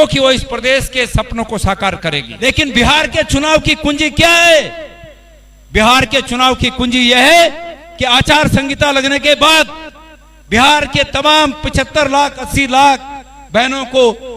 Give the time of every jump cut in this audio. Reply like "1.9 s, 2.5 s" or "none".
2.3 s